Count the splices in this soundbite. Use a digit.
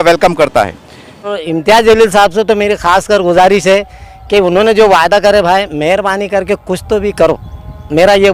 1